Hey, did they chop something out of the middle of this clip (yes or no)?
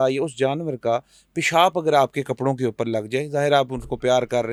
no